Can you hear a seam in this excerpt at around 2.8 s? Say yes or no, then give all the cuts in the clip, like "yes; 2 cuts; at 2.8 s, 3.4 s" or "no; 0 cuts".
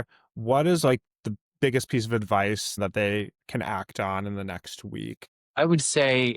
yes; 2 cuts; at 2.8 s, 5.3 s